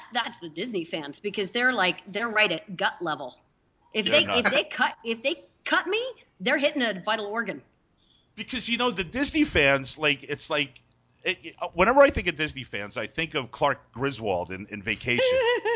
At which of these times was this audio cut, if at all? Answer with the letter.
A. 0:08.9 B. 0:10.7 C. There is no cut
C